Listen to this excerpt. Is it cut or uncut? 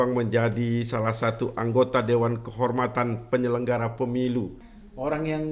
cut